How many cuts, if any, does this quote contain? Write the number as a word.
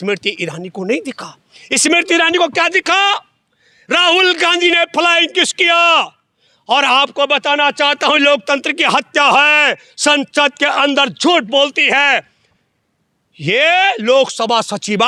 zero